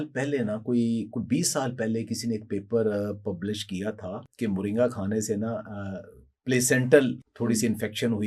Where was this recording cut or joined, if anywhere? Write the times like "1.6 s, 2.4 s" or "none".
4.2 s, 7.3 s